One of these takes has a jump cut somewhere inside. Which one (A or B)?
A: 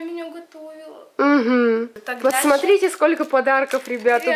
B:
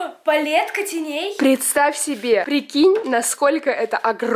A